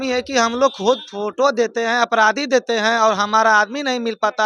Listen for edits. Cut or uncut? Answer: uncut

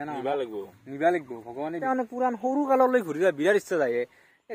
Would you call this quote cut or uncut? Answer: cut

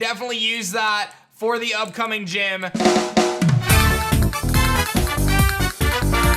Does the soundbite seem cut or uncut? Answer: cut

